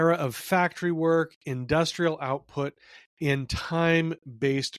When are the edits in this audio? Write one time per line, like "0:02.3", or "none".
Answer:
none